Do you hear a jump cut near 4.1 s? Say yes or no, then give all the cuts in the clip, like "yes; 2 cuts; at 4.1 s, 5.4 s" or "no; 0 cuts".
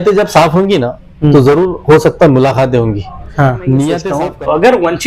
yes; 1 cut; at 4.1 s